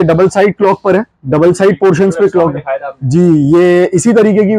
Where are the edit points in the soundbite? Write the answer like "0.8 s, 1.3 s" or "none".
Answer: none